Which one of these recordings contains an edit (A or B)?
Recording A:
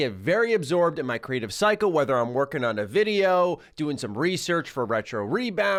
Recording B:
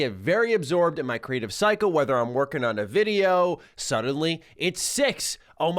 B